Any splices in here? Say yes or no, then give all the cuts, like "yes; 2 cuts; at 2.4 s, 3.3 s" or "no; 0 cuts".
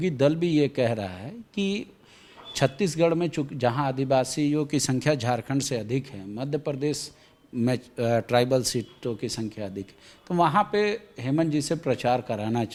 no; 0 cuts